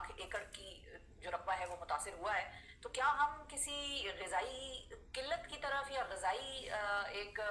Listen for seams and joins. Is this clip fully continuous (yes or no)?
yes